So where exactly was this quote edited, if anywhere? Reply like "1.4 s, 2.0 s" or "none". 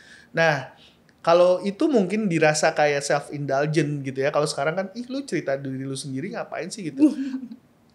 none